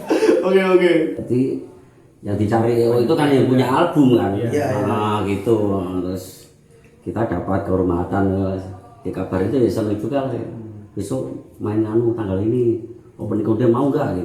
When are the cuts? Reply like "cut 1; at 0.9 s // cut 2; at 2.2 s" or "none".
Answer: cut 1; at 1.2 s